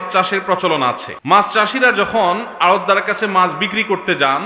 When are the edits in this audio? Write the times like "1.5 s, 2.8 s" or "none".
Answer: 1.1 s